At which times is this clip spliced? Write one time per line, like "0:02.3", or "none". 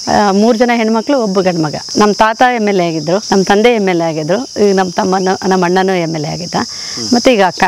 0:01.9
0:03.2